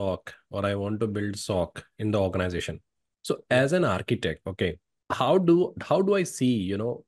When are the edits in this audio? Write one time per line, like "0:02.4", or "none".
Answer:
0:04.9